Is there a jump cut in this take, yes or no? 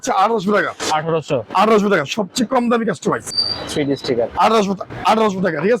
yes